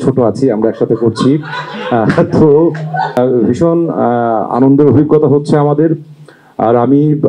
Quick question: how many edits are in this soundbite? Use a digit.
1